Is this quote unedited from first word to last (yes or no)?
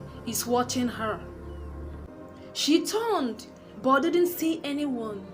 no